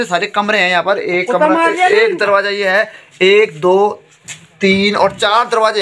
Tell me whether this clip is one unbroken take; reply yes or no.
yes